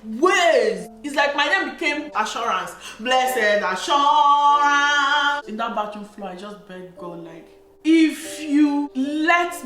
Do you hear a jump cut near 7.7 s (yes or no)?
yes